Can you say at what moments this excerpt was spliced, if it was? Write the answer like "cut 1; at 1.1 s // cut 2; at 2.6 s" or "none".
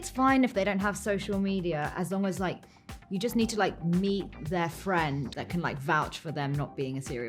cut 1; at 5.3 s